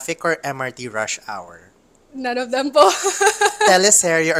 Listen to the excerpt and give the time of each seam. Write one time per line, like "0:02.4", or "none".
none